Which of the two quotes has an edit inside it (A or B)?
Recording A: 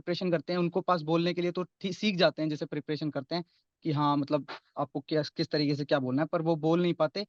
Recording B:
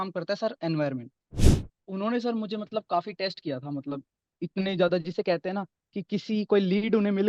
B